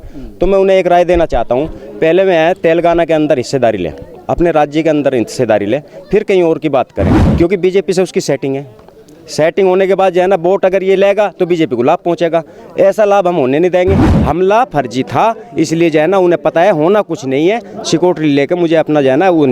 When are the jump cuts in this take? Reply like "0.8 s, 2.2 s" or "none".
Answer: 7.2 s, 14.1 s